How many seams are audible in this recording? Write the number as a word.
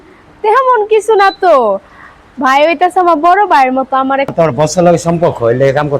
one